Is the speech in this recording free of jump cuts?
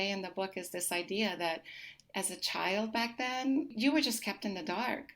yes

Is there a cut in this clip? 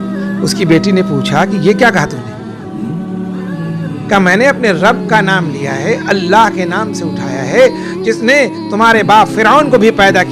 yes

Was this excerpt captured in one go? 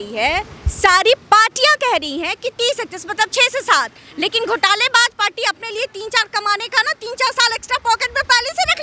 yes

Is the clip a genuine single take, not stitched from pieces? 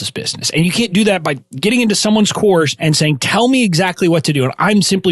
no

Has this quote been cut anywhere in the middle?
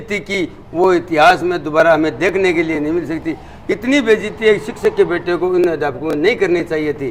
no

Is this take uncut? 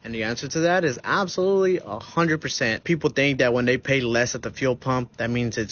no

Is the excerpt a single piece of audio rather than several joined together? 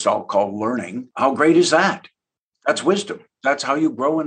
no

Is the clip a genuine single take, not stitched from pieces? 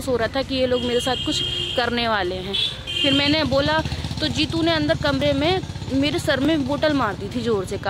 yes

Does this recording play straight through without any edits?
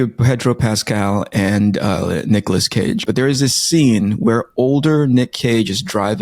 no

